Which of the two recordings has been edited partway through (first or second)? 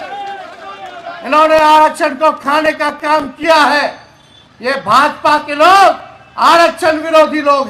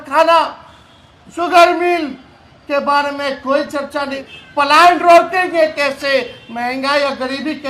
second